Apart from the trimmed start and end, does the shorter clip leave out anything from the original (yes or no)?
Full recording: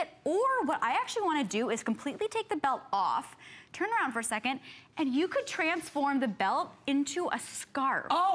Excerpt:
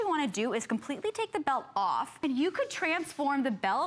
yes